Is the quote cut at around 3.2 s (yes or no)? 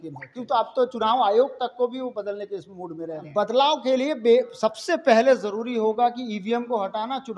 yes